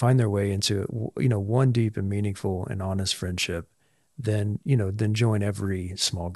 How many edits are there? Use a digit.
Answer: 0